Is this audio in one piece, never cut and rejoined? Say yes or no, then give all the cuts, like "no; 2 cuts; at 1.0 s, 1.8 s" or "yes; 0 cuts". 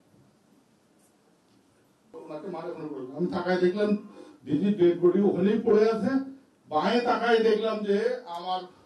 no; 1 cut; at 2.2 s